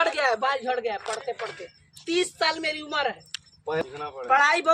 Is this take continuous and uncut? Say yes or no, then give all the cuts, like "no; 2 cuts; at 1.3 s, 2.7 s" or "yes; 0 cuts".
no; 1 cut; at 3.8 s